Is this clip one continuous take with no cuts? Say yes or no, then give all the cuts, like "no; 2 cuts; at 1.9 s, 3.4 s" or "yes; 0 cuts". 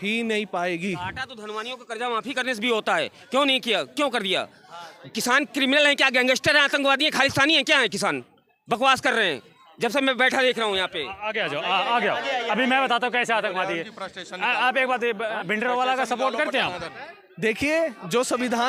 yes; 0 cuts